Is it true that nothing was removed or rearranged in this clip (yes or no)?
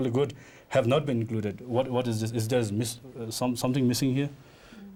yes